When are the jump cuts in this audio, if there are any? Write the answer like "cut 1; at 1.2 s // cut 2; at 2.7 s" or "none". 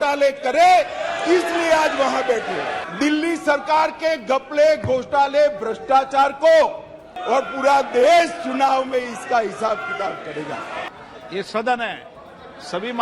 cut 1; at 2.8 s // cut 2; at 7.1 s // cut 3; at 10.9 s